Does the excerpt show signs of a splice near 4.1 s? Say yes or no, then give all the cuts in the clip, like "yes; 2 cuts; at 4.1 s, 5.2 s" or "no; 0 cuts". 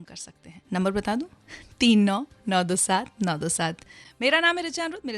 no; 0 cuts